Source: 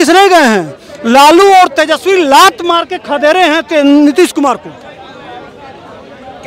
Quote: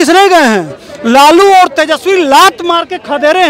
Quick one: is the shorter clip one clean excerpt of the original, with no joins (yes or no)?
yes